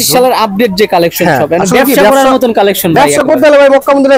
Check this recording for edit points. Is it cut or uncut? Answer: uncut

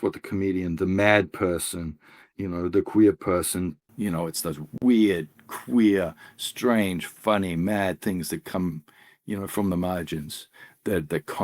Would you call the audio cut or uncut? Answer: cut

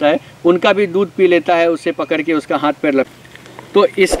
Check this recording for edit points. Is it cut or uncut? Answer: cut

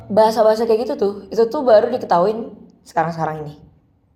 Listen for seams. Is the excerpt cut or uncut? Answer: uncut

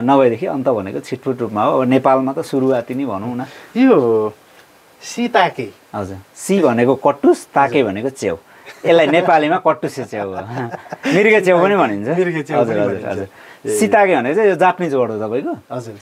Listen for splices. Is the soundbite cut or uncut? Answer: uncut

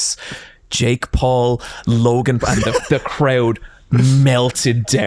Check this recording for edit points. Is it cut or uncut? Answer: uncut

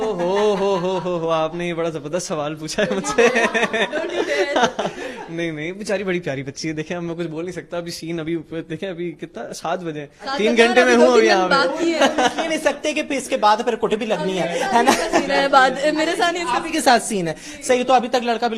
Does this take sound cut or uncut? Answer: uncut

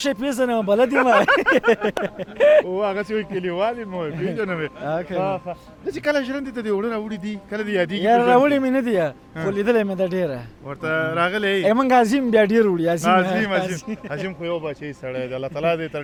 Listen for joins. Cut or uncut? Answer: uncut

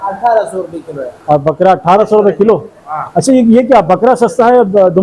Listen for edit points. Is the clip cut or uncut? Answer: uncut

